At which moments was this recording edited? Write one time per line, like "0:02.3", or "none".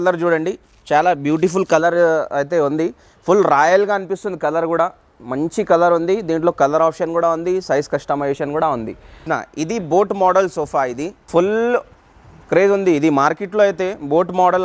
0:09.2
0:11.1